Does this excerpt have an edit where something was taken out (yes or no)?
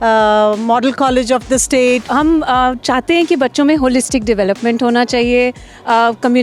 yes